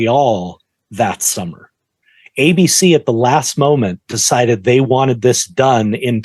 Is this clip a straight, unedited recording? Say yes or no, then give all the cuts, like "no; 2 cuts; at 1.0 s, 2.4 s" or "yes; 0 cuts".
yes; 0 cuts